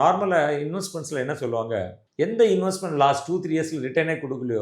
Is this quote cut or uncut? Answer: uncut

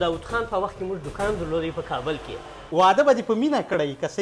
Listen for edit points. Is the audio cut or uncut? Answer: cut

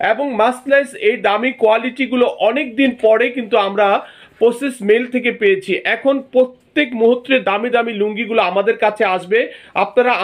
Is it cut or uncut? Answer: uncut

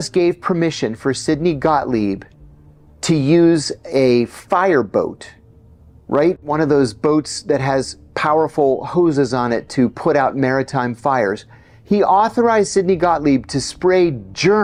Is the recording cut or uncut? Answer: uncut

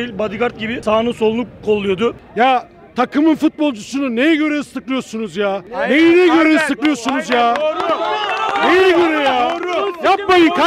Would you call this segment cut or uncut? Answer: cut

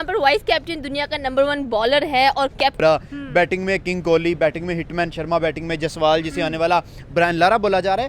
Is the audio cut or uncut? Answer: cut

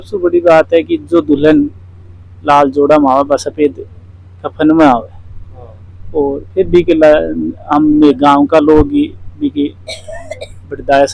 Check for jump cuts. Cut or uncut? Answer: uncut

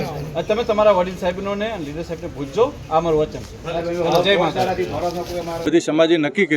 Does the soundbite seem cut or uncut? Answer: cut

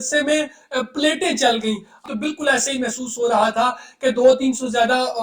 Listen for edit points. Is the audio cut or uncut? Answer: cut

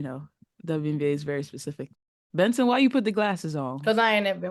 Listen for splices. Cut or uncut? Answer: cut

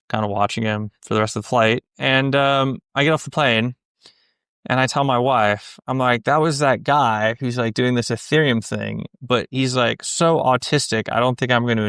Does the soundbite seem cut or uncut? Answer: uncut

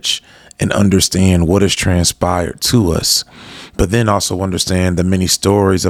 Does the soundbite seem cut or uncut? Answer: uncut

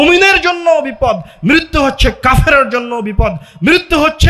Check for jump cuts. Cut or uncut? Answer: uncut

